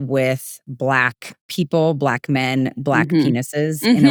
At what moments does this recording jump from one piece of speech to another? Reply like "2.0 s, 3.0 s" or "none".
none